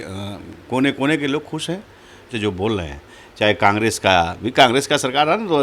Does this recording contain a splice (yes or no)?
yes